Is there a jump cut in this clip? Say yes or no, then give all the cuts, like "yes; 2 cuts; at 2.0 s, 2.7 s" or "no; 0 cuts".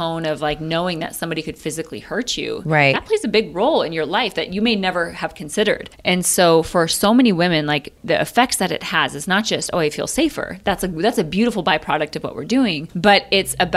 yes; 3 cuts; at 5.9 s, 7.9 s, 12.9 s